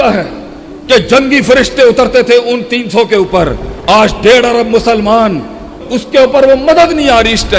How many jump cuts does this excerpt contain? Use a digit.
1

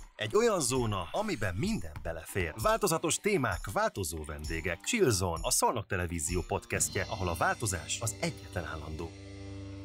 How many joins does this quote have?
0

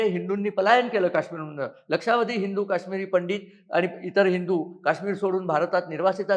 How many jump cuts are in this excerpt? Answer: 0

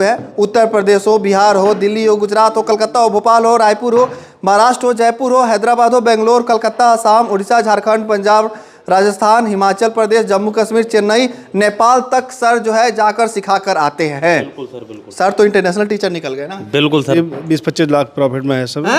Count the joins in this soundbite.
1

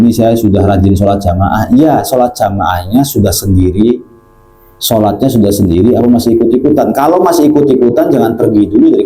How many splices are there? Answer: 0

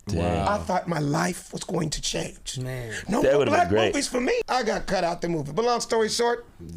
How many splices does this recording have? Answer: 1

